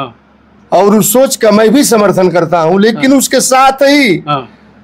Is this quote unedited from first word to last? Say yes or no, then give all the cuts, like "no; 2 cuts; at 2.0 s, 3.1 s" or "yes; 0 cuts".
yes; 0 cuts